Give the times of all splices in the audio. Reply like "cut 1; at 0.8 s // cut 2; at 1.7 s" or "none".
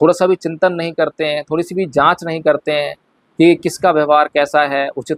none